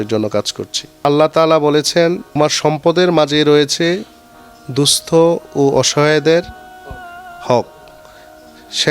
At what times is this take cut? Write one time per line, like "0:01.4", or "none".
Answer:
0:01.0
0:02.4